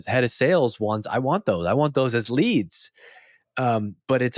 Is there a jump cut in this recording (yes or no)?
no